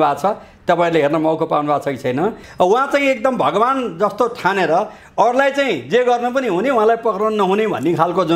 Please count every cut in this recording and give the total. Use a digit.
1